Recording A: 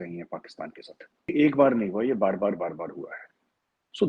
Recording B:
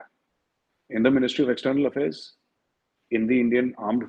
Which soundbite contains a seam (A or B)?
A